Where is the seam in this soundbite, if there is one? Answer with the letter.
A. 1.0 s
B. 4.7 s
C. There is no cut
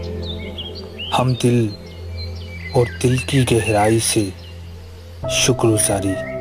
A